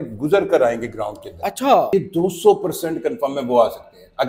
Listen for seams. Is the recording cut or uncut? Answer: cut